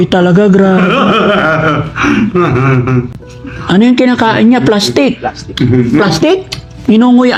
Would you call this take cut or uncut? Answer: uncut